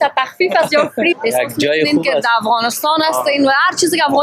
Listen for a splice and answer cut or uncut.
cut